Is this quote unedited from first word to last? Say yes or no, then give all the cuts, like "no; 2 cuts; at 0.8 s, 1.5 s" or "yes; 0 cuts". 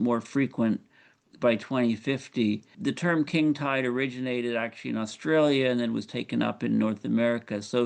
yes; 0 cuts